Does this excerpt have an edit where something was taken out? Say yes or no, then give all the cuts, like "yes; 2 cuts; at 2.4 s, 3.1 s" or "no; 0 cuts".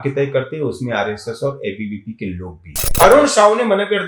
yes; 1 cut; at 2.9 s